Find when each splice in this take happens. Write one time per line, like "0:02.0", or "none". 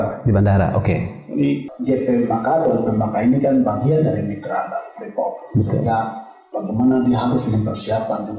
0:01.7